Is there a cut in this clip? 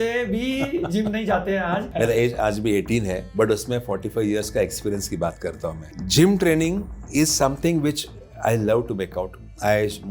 yes; 3 cuts; at 1.9 s, 3.3 s, 5.8 s

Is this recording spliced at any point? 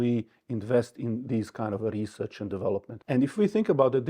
yes; 1 cut; at 2.9 s

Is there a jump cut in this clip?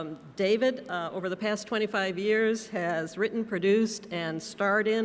yes; 1 cut; at 3.3 s

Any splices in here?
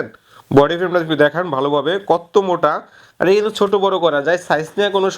no; 0 cuts

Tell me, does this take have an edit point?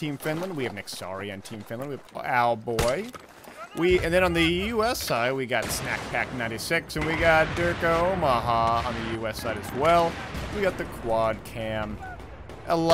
yes; 1 cut; at 10.8 s

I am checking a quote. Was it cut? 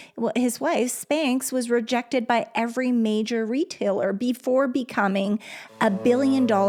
no; 0 cuts

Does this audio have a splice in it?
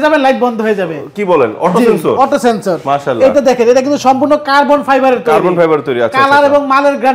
no; 0 cuts

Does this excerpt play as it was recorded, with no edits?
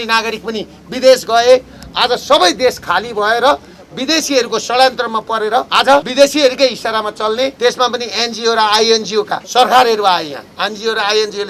no; 3 cuts; at 6.0 s, 7.5 s, 9.4 s

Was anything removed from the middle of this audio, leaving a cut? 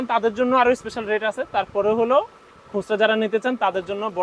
no; 0 cuts

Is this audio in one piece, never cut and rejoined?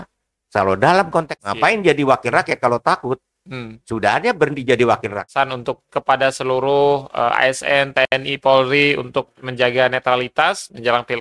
no; 2 cuts; at 1.3 s, 5.2 s

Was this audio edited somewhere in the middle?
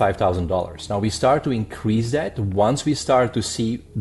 no; 0 cuts

